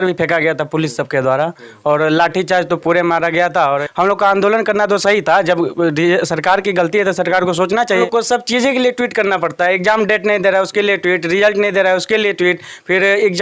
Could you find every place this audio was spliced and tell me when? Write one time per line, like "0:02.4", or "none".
0:03.9
0:08.0

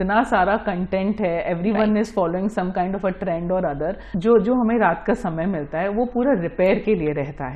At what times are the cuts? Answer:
0:04.1

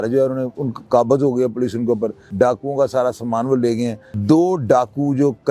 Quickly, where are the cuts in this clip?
0:02.2
0:04.1

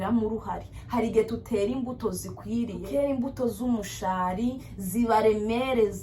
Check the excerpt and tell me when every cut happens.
0:02.8

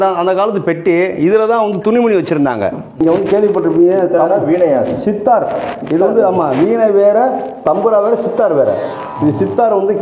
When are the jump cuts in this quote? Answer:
0:03.0

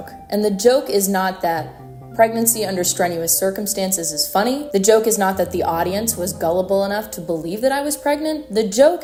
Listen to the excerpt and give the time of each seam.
none

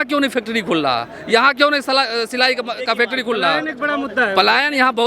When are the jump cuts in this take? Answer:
none

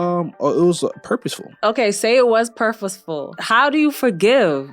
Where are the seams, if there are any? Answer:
0:01.5
0:03.4

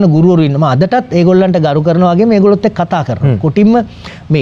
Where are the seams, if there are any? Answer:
none

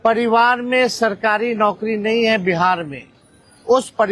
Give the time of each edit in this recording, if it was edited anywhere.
none

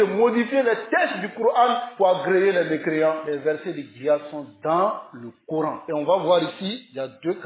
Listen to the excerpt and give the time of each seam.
0:01.9
0:03.2
0:05.8

